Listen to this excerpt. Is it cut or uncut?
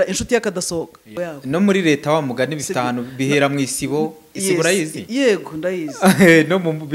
cut